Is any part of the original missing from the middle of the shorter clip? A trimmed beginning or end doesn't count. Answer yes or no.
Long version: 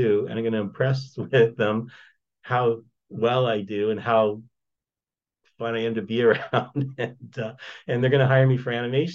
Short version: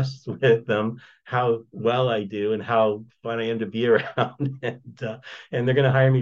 yes